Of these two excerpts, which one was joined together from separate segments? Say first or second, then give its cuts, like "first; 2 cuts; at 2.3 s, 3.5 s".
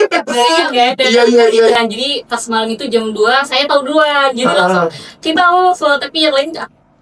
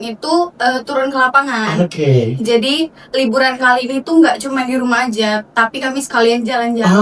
first; 1 cut; at 1.7 s